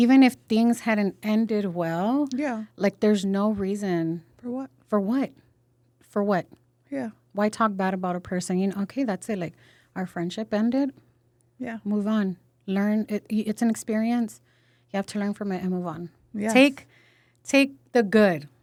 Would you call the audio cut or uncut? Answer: uncut